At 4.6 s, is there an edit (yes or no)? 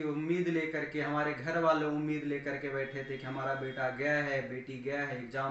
no